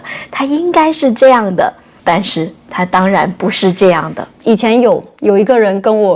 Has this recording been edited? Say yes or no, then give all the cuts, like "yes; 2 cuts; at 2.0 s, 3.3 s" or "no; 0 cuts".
yes; 1 cut; at 4.4 s